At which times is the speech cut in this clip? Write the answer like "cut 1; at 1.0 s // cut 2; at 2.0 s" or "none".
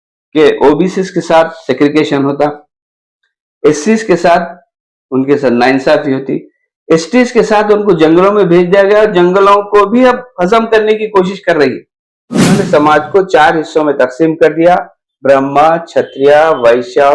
cut 1; at 12.5 s

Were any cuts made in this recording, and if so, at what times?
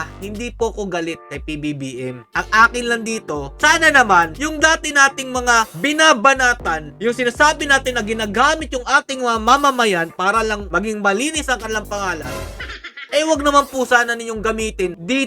none

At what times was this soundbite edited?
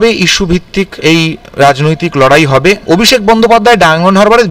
cut 1; at 0.9 s // cut 2; at 2.8 s

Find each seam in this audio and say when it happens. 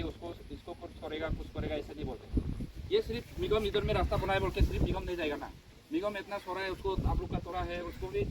cut 1; at 2.7 s

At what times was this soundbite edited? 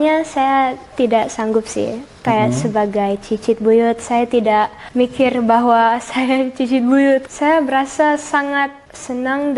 cut 1; at 7.3 s

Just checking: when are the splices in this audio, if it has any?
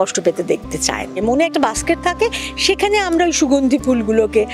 cut 1; at 1.2 s

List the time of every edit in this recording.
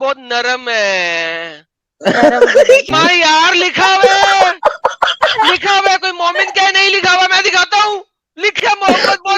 cut 1; at 2.9 s // cut 2; at 8.6 s

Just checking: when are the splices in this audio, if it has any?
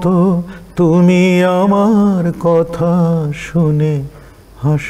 none

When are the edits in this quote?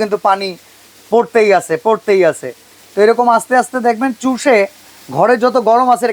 none

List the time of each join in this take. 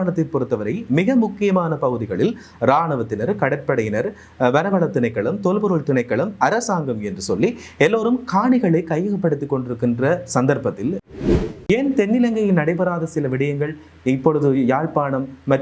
cut 1; at 11.1 s

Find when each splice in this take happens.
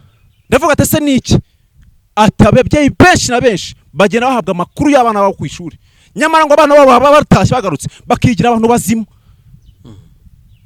none

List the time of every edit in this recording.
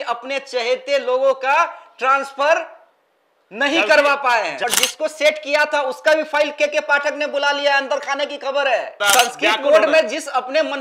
cut 1; at 4.6 s // cut 2; at 9.0 s

